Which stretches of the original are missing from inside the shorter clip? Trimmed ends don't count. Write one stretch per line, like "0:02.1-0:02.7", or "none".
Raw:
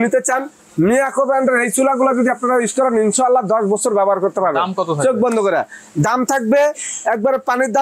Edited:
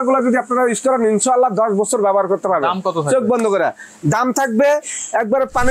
none